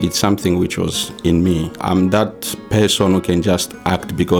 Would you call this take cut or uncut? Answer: cut